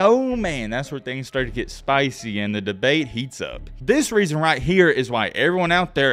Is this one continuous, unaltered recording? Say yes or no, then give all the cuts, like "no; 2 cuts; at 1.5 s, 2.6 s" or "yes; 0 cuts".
yes; 0 cuts